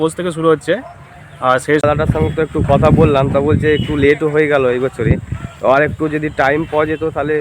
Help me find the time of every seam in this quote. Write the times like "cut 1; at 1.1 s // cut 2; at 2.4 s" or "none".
cut 1; at 1.8 s